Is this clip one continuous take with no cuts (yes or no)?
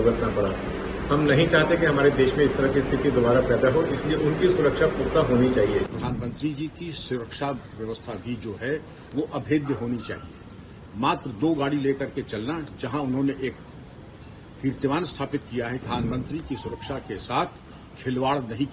no